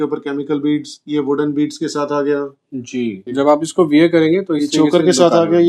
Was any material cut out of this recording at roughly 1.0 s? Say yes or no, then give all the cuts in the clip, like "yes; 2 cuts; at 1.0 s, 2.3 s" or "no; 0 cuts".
no; 1 cut; at 3.3 s